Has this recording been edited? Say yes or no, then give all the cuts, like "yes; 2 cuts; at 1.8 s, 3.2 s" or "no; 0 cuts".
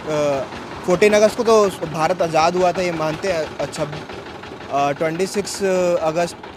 no; 0 cuts